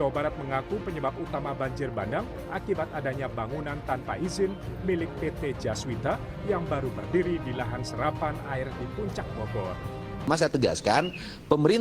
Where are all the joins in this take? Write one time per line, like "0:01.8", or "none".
0:10.3